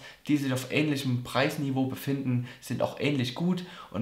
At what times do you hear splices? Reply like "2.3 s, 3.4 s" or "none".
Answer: none

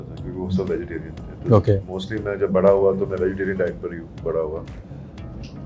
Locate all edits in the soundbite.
none

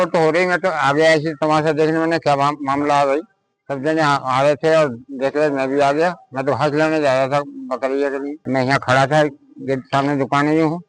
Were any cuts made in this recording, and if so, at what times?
8.4 s

